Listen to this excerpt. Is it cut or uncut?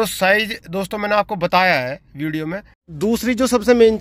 cut